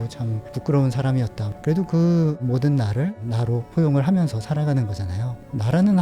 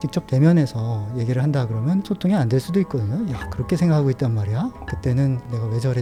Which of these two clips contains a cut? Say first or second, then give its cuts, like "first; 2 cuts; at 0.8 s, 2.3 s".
first; 2 cuts; at 1.5 s, 3.2 s